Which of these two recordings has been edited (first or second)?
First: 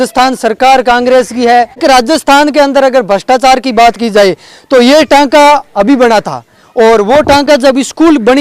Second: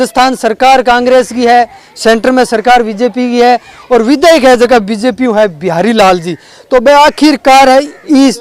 first